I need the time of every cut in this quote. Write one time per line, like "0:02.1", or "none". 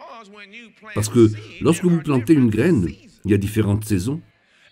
0:00.9